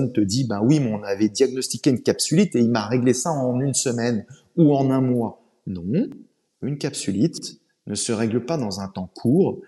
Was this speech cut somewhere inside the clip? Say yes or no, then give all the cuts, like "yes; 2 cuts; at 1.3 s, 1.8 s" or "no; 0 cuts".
no; 0 cuts